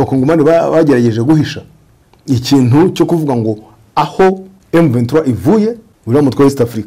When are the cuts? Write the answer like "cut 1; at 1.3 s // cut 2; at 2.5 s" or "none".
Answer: cut 1; at 4.5 s // cut 2; at 5.9 s